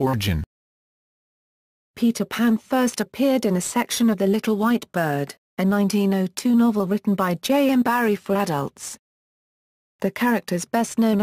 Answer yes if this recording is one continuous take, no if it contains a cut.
no